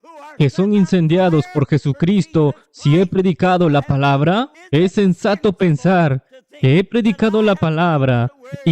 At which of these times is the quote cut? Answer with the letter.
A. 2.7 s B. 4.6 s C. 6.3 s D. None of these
B